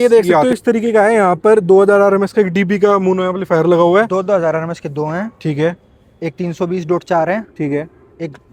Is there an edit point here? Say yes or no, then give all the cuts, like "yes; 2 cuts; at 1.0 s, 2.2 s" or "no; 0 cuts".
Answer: no; 0 cuts